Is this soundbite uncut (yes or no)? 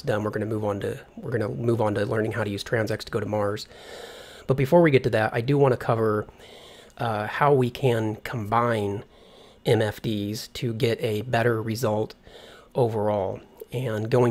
no